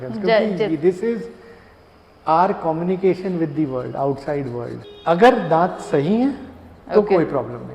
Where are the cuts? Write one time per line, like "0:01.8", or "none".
0:04.8